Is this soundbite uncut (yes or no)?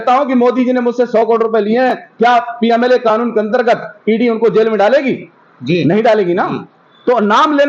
yes